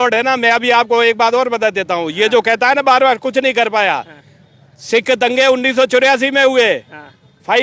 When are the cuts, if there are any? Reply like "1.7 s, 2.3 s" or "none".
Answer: none